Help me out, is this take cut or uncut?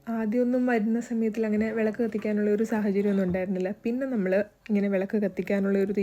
uncut